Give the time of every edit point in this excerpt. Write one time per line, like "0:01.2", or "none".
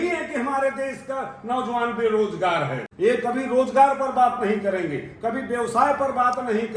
0:02.8